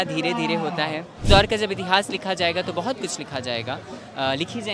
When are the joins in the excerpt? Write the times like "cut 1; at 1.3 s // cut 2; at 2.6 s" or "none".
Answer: cut 1; at 1.1 s

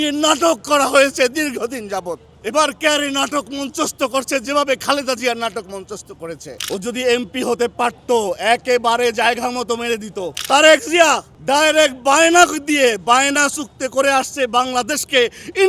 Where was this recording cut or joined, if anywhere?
cut 1; at 2.3 s // cut 2; at 6.5 s // cut 3; at 10.4 s // cut 4; at 11.3 s

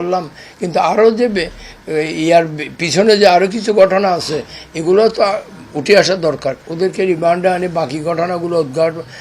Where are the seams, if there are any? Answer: cut 1; at 6.7 s

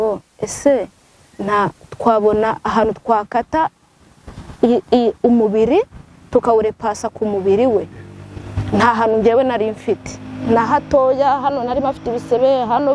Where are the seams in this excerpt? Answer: none

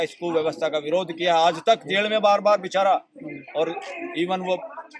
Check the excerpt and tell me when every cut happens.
none

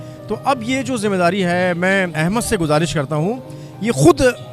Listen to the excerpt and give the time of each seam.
cut 1; at 2.2 s

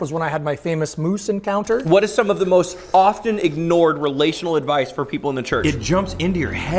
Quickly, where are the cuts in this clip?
cut 1; at 1.8 s // cut 2; at 5.6 s

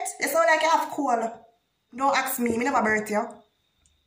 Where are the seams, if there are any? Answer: cut 1; at 1.9 s

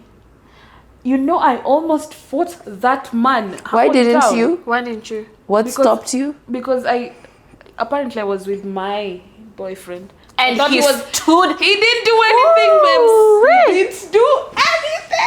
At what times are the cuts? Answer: none

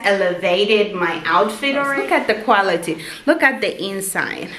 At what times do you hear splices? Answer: cut 1; at 1.9 s

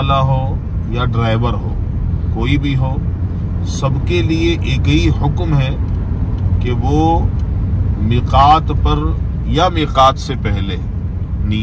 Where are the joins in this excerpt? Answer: none

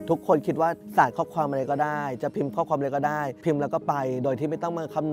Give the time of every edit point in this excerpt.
cut 1; at 0.8 s // cut 2; at 3.4 s

